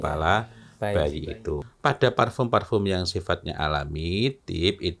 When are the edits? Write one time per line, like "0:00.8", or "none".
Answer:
0:01.6

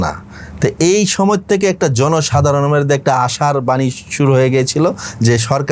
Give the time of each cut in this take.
none

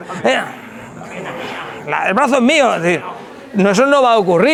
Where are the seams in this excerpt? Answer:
none

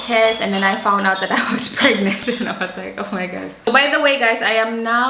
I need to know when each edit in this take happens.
0:03.5

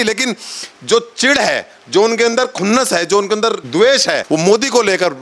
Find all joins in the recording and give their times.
0:03.6
0:04.2

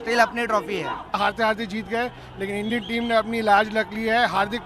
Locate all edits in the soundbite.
0:01.2

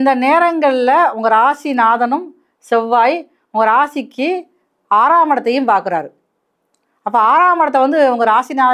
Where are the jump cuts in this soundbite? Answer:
none

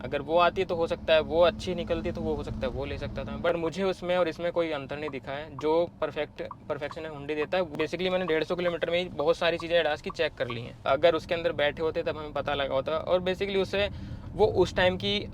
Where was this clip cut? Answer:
0:03.5
0:07.7
0:10.8

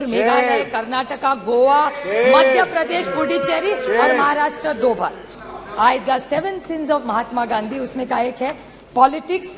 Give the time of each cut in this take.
0:05.2

